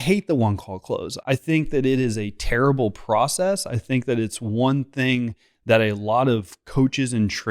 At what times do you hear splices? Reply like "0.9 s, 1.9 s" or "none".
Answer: 1.1 s